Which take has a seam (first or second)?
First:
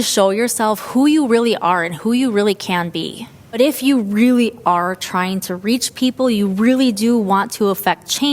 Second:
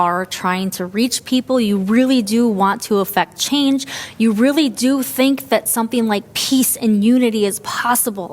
first